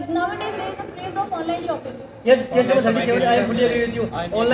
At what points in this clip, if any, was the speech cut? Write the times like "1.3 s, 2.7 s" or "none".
none